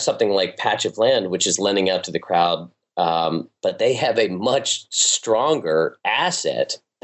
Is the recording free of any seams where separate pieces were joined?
yes; 0 cuts

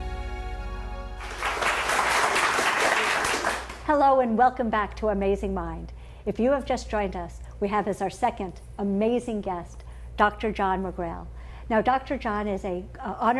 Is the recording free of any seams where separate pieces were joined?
no; 2 cuts; at 1.1 s, 10.1 s

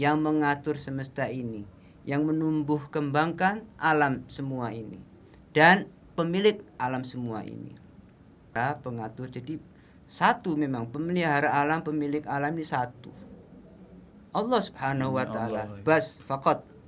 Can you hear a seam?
yes; 1 cut; at 8.6 s

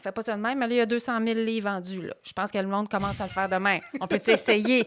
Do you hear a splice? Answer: no; 0 cuts

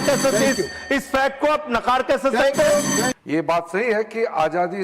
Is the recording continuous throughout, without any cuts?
no; 1 cut; at 3.1 s

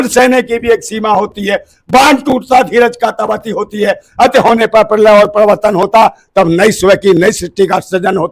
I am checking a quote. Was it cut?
no; 0 cuts

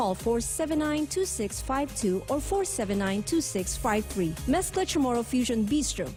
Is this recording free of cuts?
yes; 0 cuts

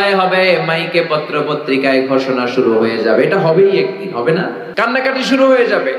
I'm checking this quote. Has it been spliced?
yes; 1 cut; at 4.6 s

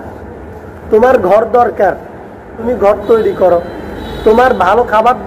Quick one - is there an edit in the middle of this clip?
yes; 1 cut; at 2.5 s

